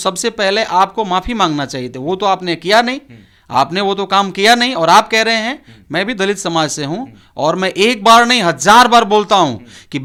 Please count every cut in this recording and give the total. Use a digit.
0